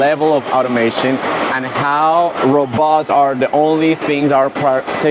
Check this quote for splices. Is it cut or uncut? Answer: uncut